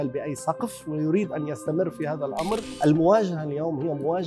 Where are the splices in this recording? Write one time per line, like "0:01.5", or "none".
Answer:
0:02.7